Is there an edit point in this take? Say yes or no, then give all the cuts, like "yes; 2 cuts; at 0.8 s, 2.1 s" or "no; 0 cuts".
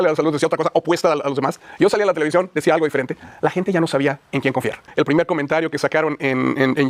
yes; 1 cut; at 4.9 s